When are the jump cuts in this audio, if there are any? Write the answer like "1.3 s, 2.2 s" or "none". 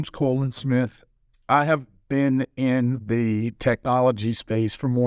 none